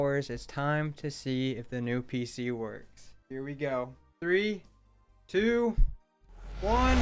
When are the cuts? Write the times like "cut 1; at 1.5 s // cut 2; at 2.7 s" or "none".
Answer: none